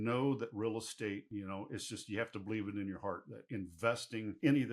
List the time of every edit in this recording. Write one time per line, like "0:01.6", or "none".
0:01.2
0:03.3